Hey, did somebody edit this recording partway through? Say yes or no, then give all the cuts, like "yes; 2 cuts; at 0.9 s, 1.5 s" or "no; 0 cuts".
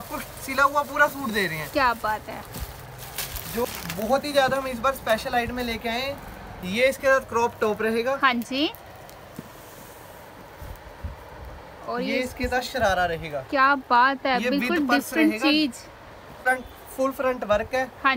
yes; 2 cuts; at 3.6 s, 16.4 s